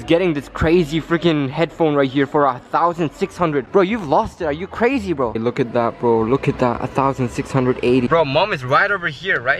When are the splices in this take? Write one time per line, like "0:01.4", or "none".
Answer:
0:05.3
0:08.1